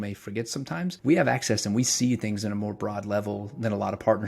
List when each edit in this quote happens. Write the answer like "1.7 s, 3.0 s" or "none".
1.0 s